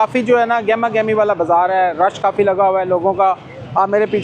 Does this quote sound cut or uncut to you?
uncut